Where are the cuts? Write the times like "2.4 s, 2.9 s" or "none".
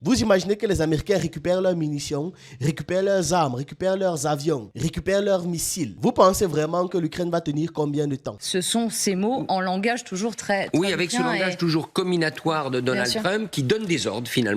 8.3 s